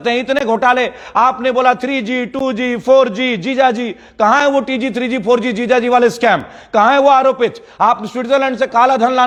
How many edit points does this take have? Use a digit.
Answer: 0